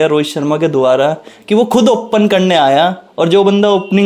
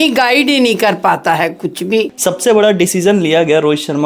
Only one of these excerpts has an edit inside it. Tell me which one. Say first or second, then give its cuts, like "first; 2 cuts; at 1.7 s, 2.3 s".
second; 1 cut; at 2.1 s